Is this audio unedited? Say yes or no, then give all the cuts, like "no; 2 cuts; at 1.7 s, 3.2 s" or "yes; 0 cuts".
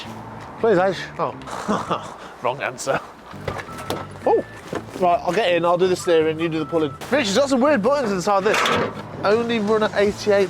no; 5 cuts; at 1.4 s, 3.3 s, 4.6 s, 7.0 s, 9.0 s